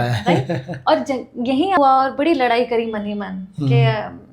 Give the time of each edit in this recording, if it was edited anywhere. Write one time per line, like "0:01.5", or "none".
0:01.8